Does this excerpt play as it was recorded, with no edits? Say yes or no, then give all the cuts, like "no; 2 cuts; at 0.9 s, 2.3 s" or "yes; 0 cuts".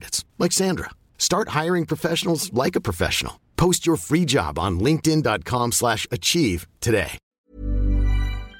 no; 1 cut; at 7.3 s